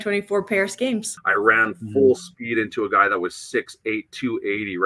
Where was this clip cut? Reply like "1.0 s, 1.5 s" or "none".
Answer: 1.2 s